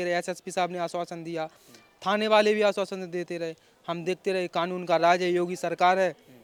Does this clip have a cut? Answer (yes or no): no